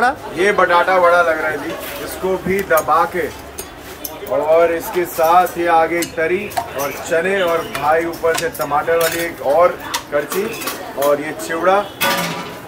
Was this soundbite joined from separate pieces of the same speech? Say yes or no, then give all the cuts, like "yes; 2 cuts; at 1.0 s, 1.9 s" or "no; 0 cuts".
no; 0 cuts